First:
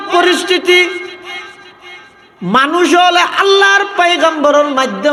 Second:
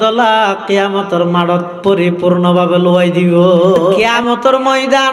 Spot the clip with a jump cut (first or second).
second